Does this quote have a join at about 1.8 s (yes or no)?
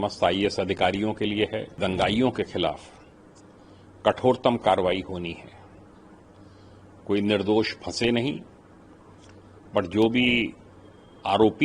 yes